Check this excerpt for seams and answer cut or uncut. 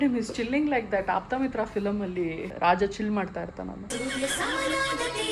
cut